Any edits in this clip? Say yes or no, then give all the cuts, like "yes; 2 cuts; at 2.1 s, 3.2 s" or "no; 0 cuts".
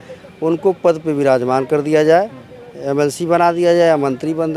no; 0 cuts